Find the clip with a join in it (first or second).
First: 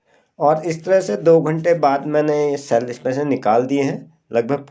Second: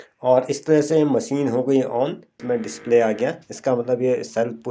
second